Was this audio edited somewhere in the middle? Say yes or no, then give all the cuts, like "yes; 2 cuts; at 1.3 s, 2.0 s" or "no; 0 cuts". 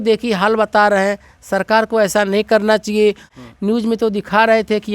yes; 1 cut; at 3.3 s